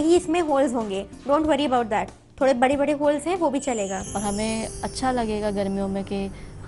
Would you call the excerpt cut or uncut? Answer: cut